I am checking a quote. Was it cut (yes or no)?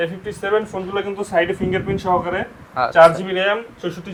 no